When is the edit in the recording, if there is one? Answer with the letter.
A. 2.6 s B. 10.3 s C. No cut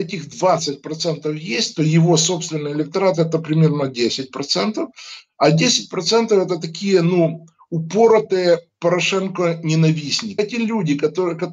B